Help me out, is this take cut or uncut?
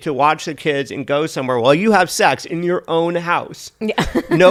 uncut